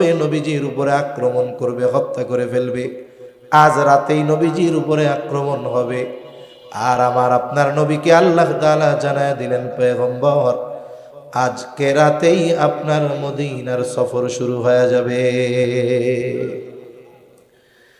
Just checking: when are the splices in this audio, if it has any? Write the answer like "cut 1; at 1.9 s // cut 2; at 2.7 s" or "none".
none